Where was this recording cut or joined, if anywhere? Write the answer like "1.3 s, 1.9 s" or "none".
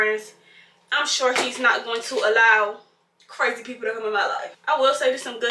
none